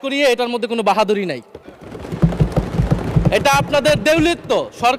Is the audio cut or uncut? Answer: uncut